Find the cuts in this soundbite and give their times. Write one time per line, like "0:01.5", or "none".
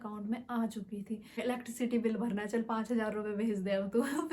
0:01.4